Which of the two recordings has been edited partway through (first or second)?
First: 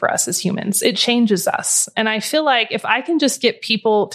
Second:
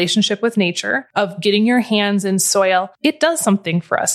second